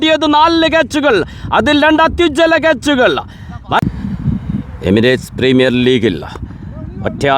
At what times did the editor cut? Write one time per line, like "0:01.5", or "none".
0:03.8